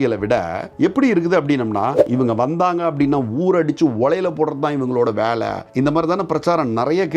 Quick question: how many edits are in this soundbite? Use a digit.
2